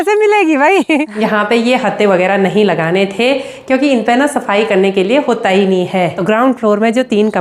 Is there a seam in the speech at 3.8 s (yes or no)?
no